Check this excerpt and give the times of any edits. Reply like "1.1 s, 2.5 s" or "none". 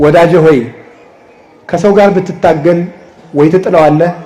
none